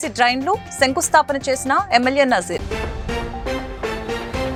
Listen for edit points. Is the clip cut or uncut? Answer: uncut